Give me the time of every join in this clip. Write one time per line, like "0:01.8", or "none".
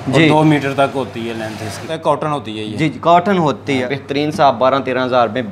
0:01.8
0:03.9